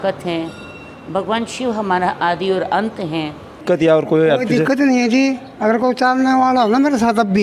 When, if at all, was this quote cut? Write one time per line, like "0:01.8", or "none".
0:03.6